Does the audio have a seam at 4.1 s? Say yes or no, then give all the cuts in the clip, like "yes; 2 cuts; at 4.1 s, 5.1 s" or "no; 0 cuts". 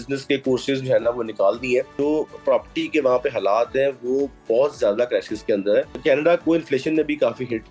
no; 2 cuts; at 1.9 s, 5.9 s